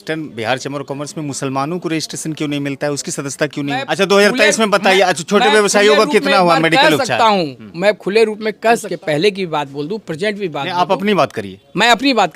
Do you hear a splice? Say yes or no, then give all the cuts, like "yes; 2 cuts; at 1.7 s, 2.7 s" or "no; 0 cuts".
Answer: yes; 2 cuts; at 3.8 s, 8.9 s